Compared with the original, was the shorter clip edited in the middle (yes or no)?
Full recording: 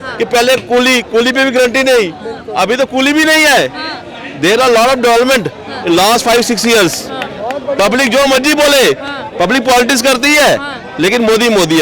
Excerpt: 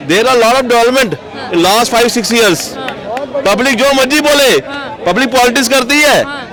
no